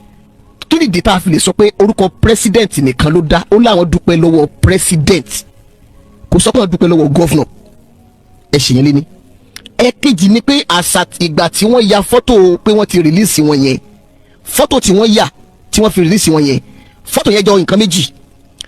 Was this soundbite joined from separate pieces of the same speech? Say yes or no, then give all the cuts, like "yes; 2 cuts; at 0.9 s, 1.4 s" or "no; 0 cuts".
no; 0 cuts